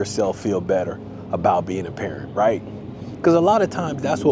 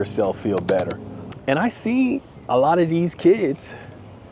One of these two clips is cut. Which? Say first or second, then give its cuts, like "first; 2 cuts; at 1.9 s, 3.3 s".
second; 1 cut; at 1.1 s